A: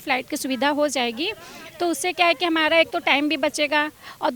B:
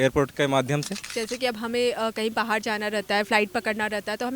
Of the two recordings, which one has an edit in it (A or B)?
B